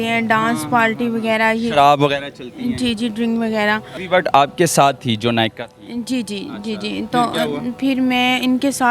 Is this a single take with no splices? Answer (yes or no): no